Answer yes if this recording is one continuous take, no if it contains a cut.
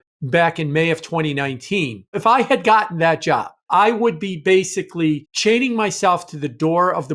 no